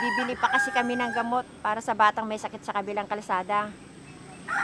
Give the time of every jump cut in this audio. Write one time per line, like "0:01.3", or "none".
none